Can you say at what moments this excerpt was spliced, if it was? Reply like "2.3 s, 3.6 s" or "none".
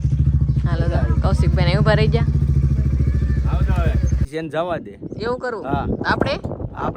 4.3 s